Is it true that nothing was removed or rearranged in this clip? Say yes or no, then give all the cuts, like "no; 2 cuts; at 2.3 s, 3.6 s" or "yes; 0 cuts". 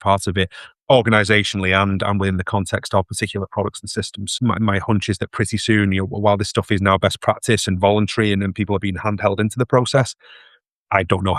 no; 1 cut; at 4.3 s